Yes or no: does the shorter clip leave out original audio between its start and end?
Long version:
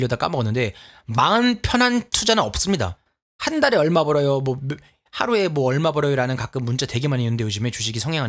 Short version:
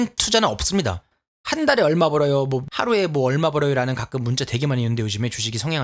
yes